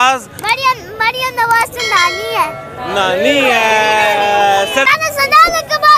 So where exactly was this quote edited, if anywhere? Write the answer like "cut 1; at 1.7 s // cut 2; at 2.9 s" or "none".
cut 1; at 4.9 s